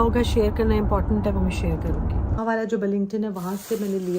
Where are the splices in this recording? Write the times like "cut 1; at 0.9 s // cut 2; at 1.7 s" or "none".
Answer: cut 1; at 2.4 s